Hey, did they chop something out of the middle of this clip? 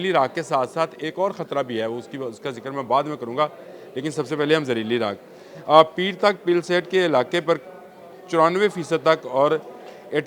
no; 0 cuts

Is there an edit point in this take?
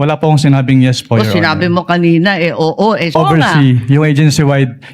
yes; 1 cut; at 3.1 s

